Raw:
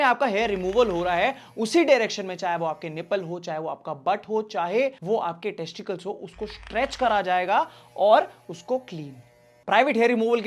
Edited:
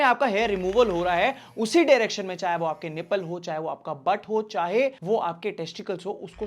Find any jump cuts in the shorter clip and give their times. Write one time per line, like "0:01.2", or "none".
none